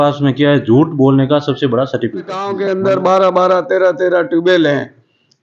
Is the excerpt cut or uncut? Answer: cut